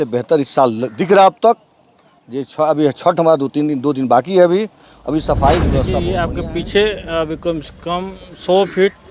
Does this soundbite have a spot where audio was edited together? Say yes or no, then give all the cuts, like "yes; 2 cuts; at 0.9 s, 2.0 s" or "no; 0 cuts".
yes; 1 cut; at 6.1 s